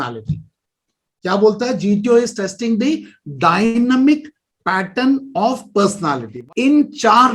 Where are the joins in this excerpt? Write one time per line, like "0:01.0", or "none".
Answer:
0:06.3